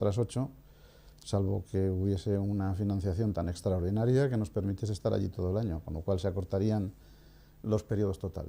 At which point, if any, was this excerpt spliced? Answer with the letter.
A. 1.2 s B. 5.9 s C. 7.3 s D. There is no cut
B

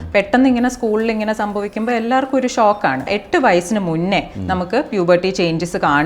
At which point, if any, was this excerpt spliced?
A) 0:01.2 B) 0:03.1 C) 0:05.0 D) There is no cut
B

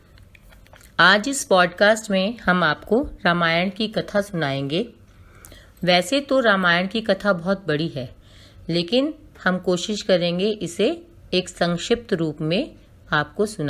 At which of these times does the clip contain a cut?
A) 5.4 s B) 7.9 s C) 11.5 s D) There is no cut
D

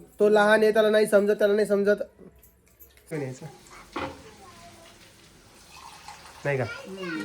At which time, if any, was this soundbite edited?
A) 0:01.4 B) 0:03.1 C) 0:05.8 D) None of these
B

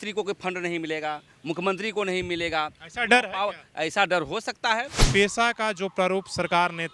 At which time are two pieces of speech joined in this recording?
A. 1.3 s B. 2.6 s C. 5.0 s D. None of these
C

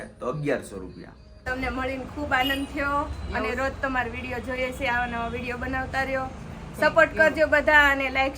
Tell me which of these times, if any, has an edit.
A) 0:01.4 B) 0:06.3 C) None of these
A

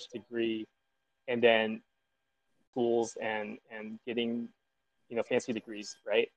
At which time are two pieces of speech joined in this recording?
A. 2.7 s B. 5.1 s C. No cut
A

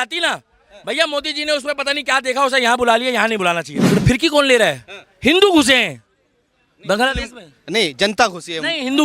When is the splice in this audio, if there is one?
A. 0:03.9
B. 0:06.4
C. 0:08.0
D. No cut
A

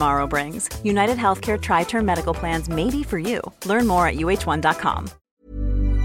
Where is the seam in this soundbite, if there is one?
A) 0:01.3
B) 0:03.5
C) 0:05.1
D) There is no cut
C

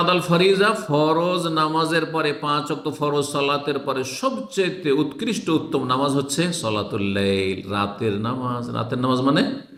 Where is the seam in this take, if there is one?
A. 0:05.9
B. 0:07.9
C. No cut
C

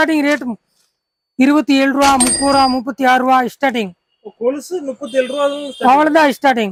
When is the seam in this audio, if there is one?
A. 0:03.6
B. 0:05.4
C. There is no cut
C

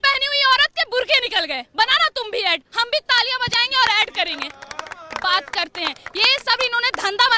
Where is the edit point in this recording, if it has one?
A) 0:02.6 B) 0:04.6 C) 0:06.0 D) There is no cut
D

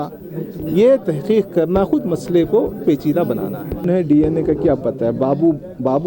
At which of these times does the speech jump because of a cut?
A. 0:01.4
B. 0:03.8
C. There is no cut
B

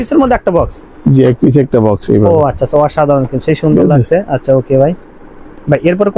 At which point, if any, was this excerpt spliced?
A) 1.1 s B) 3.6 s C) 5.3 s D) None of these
D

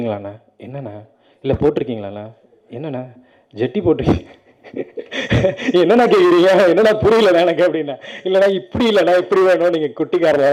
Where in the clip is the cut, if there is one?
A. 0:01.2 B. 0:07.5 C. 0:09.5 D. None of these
D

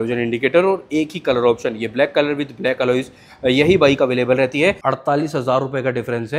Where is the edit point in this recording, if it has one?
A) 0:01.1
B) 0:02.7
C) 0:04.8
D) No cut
C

